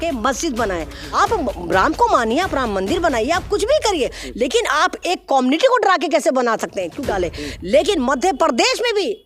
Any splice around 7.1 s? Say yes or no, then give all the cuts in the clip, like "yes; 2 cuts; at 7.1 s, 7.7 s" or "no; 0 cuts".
yes; 2 cuts; at 1.2 s, 7.1 s